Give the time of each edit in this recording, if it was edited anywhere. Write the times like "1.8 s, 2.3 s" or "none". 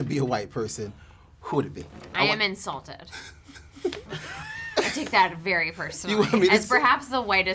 2.0 s